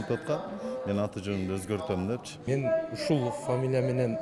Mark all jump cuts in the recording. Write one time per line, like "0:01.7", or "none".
0:02.3